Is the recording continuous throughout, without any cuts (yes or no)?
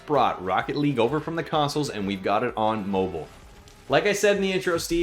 no